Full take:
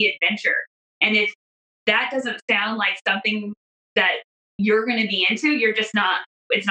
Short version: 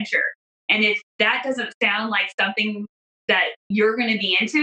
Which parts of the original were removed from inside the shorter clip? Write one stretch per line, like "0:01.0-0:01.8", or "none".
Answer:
0:01.4-0:01.7
0:04.3-0:04.5